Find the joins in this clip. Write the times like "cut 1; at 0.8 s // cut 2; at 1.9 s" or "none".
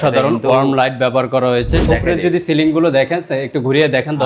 cut 1; at 1.8 s